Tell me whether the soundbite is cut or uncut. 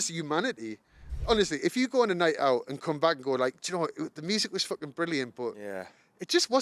cut